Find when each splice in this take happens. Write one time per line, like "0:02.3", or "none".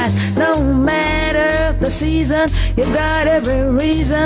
0:03.3